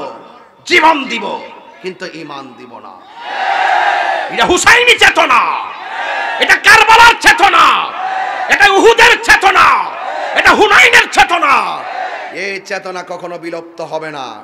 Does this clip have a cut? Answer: no; 0 cuts

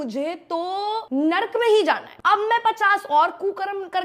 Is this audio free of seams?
no; 2 cuts; at 1.1 s, 2.1 s

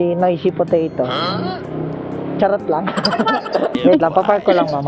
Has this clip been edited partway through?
yes; 1 cut; at 3.8 s

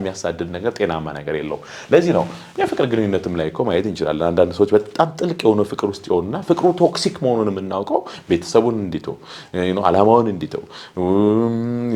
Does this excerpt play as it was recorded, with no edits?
yes; 0 cuts

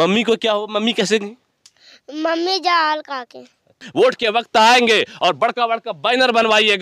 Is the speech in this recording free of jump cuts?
no; 1 cut; at 3.8 s

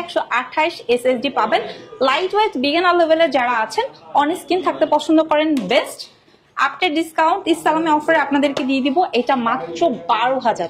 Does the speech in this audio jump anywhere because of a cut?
no; 0 cuts

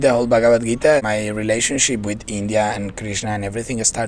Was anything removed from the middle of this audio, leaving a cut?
yes; 1 cut; at 1.0 s

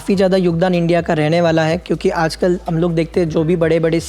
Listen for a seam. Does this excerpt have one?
no; 0 cuts

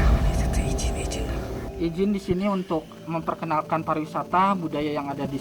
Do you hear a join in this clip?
yes; 1 cut; at 1.6 s

